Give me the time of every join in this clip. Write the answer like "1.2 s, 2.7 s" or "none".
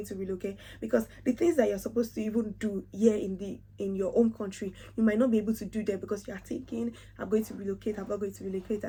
none